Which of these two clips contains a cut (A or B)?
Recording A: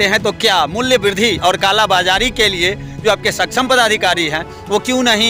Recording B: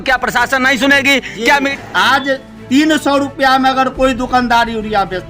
B